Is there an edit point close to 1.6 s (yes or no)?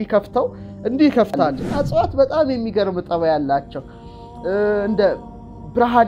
yes